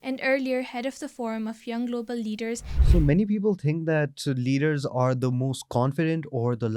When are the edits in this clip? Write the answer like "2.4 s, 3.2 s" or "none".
2.7 s